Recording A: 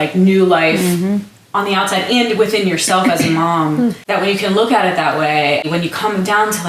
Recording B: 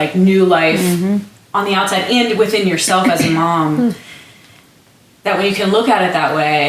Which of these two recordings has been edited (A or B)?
A